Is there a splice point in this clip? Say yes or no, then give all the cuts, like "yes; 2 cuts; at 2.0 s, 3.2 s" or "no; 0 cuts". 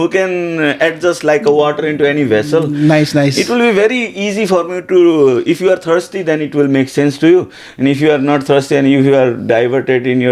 no; 0 cuts